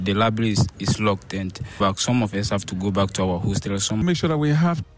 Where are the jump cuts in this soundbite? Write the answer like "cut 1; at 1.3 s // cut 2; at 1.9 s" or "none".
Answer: cut 1; at 1.8 s // cut 2; at 4.0 s